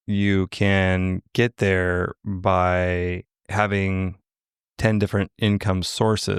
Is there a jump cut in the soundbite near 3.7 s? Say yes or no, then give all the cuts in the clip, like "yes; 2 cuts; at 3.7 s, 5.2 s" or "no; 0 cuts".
no; 0 cuts